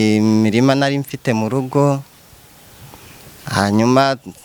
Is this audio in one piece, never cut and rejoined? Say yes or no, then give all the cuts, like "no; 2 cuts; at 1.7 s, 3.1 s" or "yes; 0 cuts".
yes; 0 cuts